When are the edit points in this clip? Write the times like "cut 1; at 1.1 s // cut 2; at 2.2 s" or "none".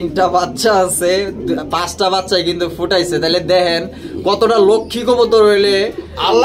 none